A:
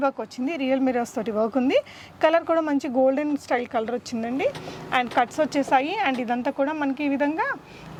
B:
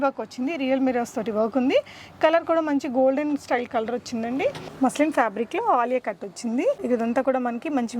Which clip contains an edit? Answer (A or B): B